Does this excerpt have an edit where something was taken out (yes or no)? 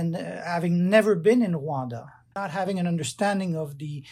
yes